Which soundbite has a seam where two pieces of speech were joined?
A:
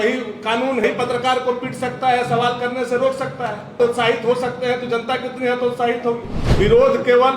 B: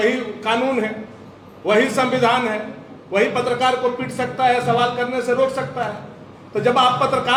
A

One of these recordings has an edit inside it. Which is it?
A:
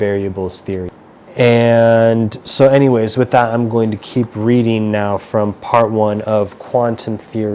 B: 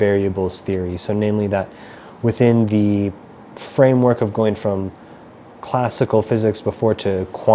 A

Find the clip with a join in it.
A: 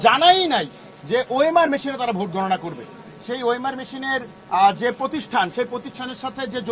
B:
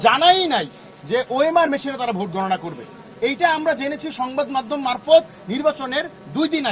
A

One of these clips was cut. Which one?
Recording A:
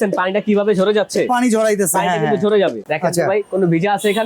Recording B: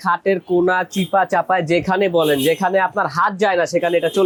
A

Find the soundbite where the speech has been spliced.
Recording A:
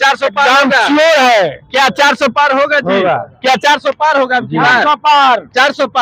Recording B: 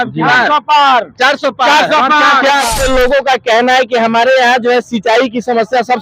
B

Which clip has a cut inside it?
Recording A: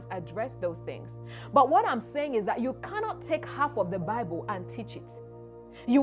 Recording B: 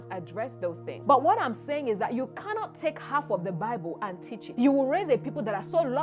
B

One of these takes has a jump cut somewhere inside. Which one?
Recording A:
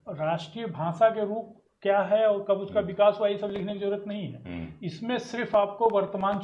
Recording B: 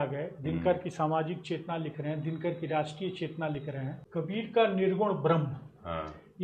B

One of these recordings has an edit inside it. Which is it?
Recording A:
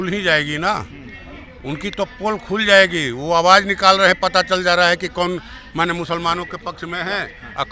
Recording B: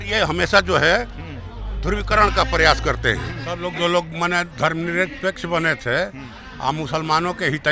B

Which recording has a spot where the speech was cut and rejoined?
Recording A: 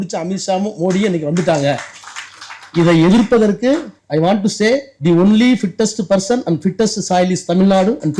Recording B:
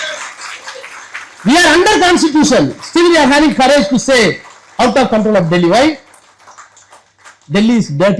A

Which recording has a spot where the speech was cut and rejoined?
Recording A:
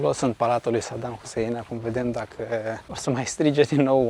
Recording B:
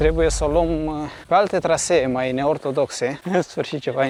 A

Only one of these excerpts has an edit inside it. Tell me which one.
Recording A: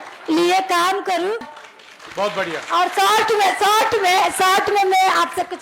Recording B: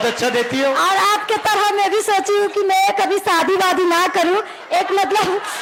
A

